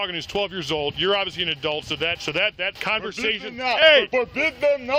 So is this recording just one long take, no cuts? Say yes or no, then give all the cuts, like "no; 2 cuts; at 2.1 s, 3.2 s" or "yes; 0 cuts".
yes; 0 cuts